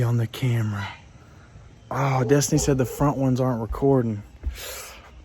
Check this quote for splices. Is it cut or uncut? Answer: uncut